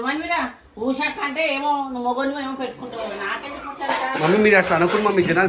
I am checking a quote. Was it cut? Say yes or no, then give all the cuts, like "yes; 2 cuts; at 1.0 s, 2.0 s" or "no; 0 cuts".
no; 0 cuts